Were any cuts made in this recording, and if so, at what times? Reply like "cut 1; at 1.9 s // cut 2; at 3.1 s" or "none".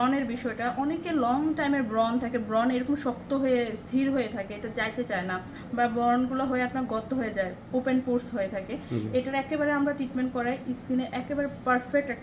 none